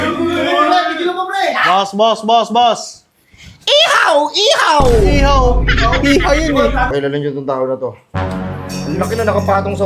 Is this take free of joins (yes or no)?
no